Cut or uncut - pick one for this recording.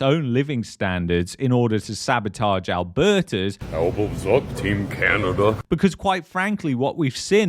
cut